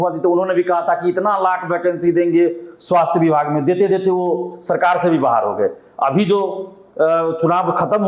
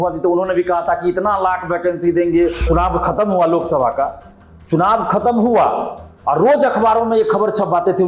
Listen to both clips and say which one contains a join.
second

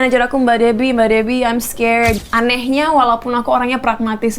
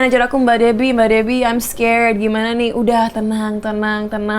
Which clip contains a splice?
first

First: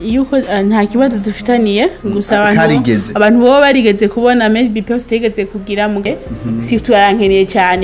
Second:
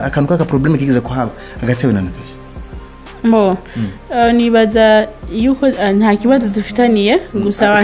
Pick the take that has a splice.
first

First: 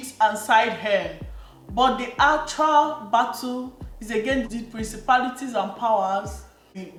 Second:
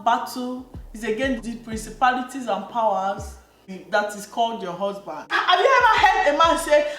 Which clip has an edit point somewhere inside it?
second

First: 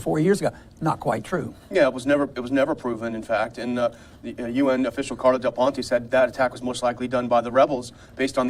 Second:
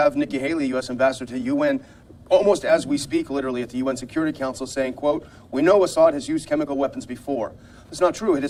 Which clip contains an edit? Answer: first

